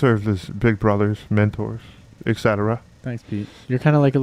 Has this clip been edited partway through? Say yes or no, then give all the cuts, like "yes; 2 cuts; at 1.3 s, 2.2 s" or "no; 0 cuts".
no; 0 cuts